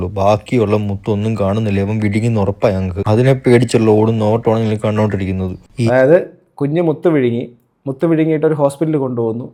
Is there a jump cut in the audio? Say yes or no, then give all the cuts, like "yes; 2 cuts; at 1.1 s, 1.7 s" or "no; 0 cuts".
no; 0 cuts